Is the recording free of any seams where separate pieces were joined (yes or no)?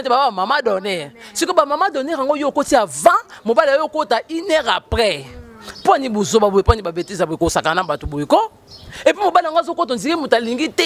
yes